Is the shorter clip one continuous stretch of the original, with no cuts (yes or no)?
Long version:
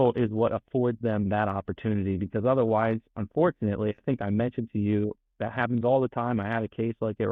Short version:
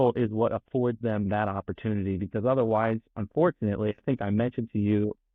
yes